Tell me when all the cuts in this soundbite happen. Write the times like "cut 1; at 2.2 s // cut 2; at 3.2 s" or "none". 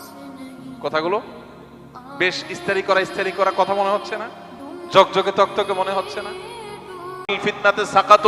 cut 1; at 7.4 s